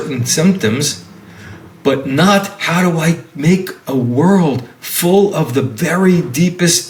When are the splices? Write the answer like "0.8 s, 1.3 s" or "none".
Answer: none

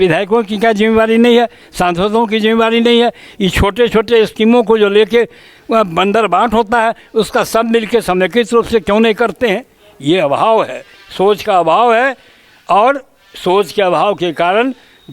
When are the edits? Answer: none

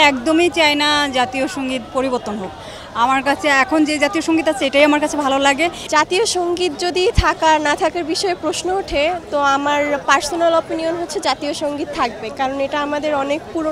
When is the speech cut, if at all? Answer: 5.8 s

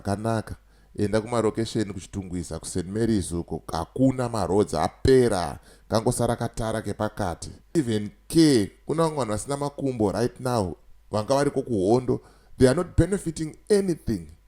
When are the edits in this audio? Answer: 7.7 s

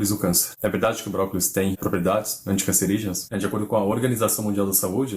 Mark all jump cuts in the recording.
1.8 s, 3.2 s

